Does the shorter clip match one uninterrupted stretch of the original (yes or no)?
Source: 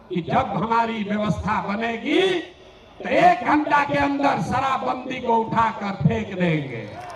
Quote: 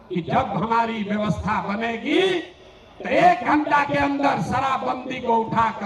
yes